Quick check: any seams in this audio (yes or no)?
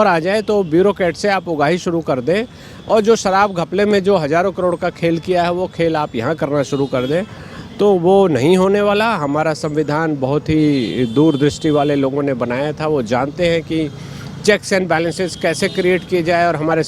no